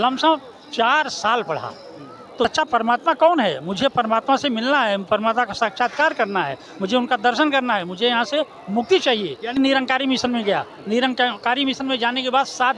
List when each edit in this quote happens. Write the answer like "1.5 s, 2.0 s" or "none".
2.5 s, 9.6 s